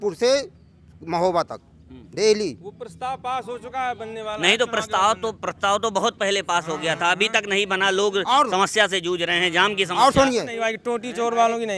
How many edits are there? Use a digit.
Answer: 1